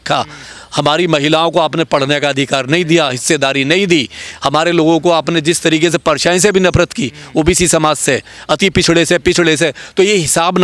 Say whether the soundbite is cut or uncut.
uncut